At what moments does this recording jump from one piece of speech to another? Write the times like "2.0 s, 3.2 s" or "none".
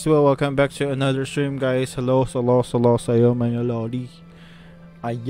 none